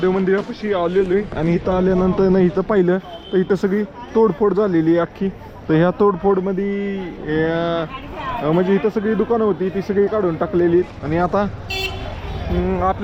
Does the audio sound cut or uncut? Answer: uncut